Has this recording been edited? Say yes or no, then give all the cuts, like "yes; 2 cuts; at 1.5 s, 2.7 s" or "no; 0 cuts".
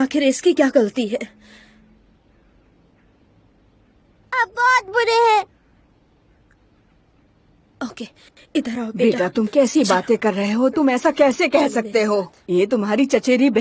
no; 0 cuts